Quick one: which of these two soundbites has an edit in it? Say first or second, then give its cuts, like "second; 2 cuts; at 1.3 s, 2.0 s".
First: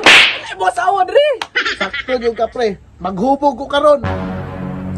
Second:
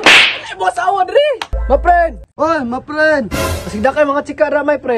second; 1 cut; at 1.5 s